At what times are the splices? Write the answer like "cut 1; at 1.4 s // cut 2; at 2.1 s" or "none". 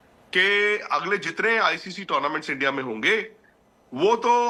none